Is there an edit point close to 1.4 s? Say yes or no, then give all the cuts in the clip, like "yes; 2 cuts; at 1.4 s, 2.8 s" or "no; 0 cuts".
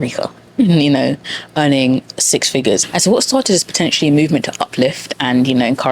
no; 1 cut; at 2.8 s